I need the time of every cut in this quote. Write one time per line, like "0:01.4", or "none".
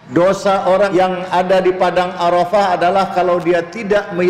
0:00.9